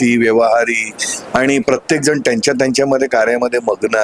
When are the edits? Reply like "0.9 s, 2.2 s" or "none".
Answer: none